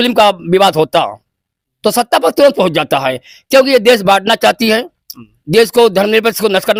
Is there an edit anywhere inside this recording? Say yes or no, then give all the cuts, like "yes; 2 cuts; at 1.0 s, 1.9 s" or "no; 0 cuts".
no; 0 cuts